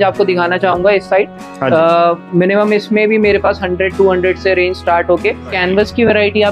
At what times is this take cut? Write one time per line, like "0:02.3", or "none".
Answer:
0:05.5